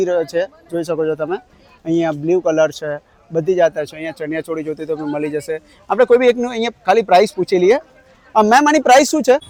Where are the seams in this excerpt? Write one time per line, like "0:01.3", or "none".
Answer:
none